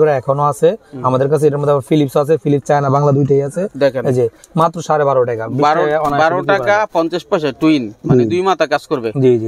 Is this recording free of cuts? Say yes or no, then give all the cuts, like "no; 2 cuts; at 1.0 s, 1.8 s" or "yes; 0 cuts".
yes; 0 cuts